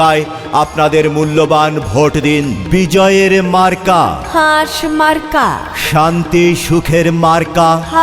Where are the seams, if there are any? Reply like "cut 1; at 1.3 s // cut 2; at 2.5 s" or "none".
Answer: cut 1; at 2.6 s